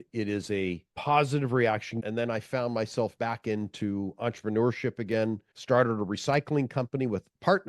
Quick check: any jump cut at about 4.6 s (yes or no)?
no